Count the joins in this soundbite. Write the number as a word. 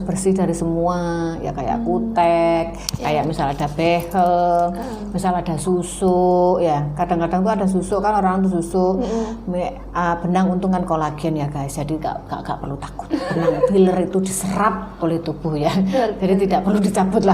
zero